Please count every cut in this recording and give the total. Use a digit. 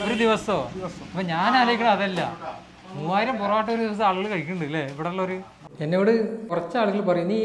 2